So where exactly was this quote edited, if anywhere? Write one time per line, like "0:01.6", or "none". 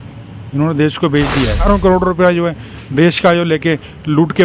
0:01.6

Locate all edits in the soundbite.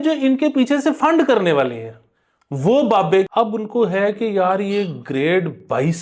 0:03.3

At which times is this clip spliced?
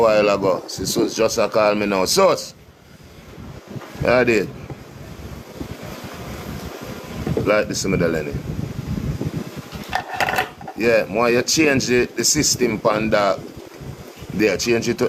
none

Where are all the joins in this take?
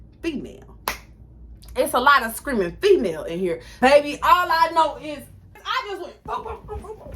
0:03.7
0:05.6

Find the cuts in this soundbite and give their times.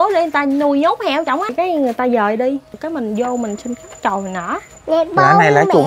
0:01.5
0:02.8
0:04.7

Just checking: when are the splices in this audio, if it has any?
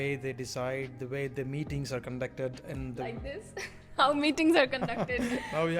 none

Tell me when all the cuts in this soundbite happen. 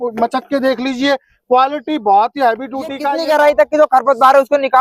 0:03.1

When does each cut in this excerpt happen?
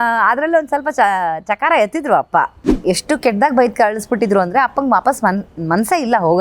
0:02.7

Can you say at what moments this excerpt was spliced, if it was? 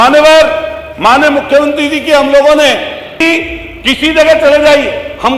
0:03.2

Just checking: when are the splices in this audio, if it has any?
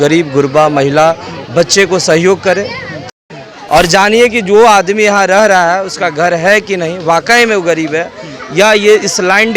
0:03.1

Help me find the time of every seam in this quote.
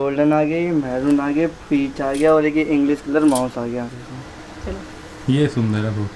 0:03.9

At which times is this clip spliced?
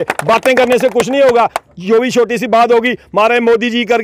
none

